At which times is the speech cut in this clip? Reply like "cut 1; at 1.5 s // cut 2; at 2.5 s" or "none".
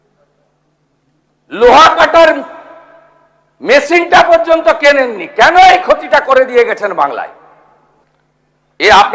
cut 1; at 8.0 s